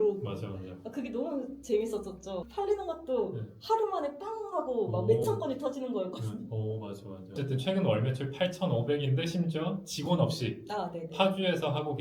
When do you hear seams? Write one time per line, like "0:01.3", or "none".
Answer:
0:02.5
0:07.4